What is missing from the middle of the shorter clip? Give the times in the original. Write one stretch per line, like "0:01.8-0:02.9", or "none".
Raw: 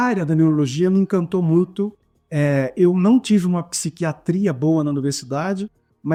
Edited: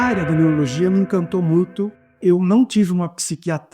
0:02.2-0:02.7